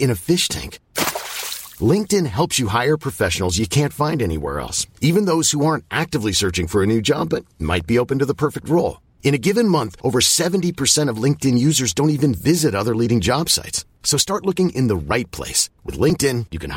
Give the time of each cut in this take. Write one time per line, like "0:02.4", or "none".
none